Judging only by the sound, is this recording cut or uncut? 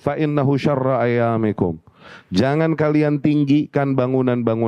uncut